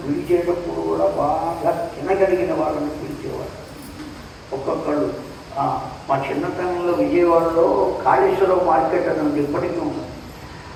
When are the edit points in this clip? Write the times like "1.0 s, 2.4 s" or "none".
none